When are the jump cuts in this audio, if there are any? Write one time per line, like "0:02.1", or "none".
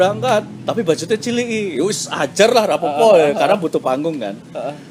none

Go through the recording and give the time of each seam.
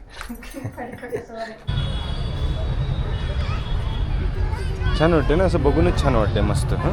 0:01.7

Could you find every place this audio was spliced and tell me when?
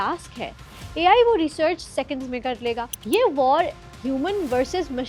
0:02.9

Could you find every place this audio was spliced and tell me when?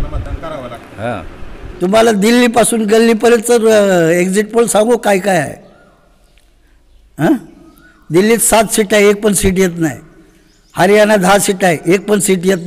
0:01.6

